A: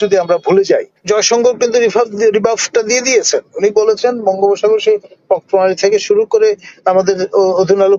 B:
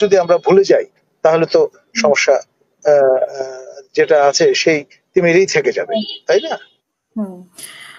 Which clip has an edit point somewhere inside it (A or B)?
A